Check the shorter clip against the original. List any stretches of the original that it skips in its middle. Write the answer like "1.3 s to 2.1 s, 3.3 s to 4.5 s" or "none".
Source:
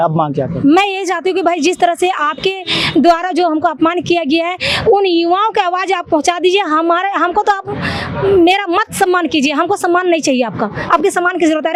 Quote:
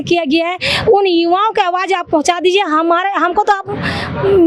none